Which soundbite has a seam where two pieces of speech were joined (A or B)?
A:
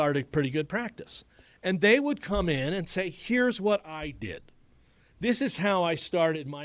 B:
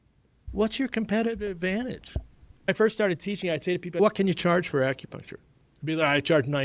B